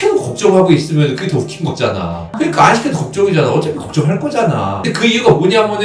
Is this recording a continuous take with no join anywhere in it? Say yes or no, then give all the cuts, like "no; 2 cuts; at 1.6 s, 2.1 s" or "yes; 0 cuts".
no; 1 cut; at 2.3 s